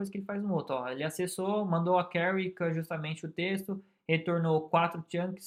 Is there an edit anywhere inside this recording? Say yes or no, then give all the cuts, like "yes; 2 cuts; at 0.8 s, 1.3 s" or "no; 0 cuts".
no; 0 cuts